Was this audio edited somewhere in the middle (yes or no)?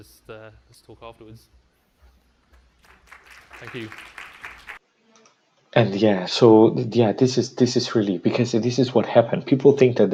no